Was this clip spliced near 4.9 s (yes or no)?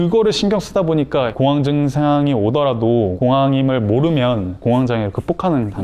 no